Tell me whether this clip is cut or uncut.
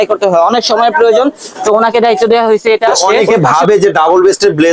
cut